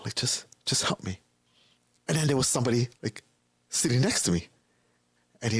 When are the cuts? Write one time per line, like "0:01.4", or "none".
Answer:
0:02.9